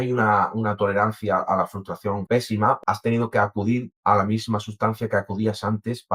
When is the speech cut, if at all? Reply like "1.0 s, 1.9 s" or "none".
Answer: 2.6 s